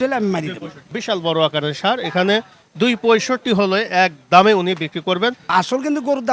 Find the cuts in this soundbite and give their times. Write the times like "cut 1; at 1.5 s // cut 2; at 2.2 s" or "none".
cut 1; at 1.0 s // cut 2; at 5.5 s